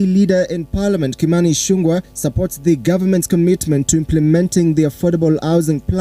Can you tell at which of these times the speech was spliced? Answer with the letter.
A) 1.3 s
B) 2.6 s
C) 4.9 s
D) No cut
A